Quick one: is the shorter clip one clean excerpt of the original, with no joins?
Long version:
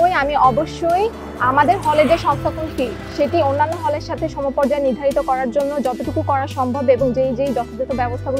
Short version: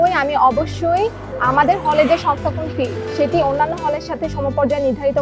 yes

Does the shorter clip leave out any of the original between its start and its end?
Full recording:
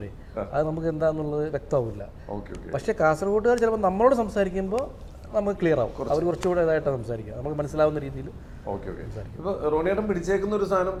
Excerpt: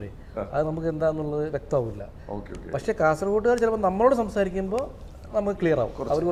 no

